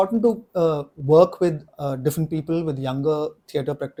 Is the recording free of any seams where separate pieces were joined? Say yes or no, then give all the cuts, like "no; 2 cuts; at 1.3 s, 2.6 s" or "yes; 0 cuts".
yes; 0 cuts